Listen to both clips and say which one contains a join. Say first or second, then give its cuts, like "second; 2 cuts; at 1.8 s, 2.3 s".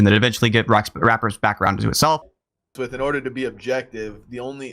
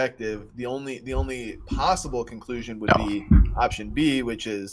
first; 1 cut; at 2.7 s